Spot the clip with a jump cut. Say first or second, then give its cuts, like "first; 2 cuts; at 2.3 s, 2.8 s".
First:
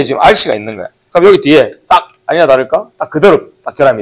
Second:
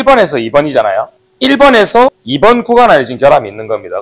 second; 2 cuts; at 1.2 s, 2.2 s